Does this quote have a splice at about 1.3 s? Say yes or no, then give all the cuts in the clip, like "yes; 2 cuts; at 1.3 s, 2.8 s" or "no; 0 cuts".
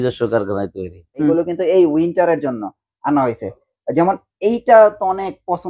yes; 1 cut; at 1.3 s